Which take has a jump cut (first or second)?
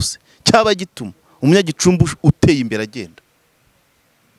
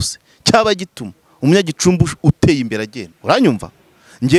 second